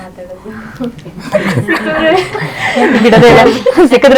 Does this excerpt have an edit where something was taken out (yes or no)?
no